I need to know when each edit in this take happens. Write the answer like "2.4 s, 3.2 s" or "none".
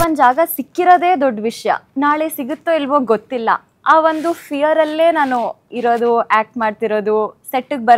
none